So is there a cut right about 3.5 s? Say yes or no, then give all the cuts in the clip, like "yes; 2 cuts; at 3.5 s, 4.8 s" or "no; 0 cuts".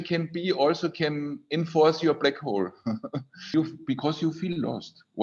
yes; 1 cut; at 3.5 s